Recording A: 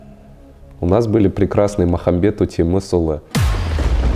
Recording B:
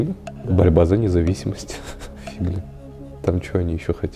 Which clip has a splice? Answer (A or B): A